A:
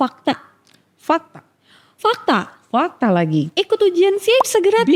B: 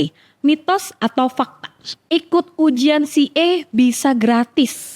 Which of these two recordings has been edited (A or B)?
B